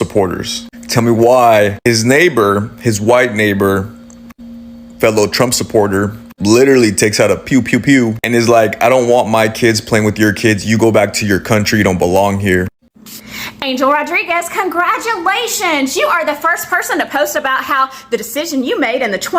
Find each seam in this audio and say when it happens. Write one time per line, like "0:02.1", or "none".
0:12.8